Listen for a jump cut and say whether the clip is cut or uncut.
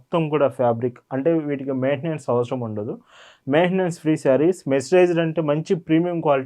uncut